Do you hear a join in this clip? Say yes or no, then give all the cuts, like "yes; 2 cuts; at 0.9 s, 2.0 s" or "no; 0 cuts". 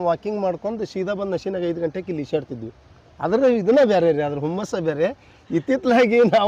no; 0 cuts